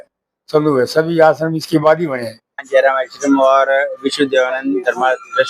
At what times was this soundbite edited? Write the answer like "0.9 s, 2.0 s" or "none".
2.6 s